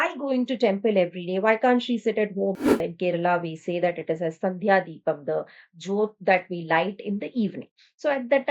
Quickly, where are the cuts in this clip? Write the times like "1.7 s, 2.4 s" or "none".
2.6 s